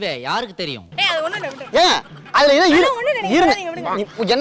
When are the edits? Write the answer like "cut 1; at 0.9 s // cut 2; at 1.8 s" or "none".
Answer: cut 1; at 0.9 s